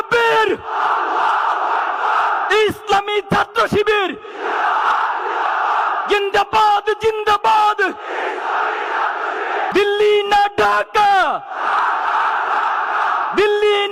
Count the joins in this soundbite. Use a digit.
1